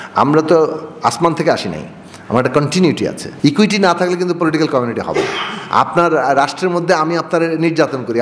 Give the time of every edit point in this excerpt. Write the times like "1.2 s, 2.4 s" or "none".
3.2 s